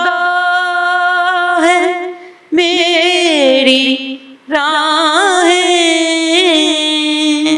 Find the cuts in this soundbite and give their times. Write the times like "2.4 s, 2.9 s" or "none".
none